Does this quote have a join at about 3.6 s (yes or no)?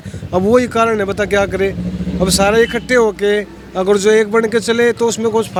no